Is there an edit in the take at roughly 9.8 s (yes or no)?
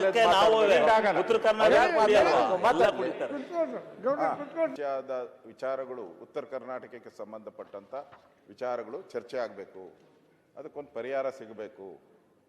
no